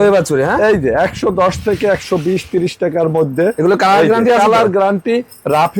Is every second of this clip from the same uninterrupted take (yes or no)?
yes